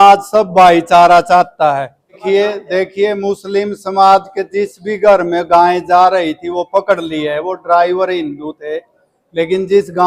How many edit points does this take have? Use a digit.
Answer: 1